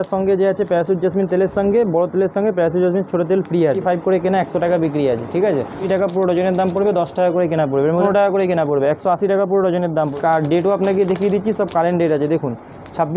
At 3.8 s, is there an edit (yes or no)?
yes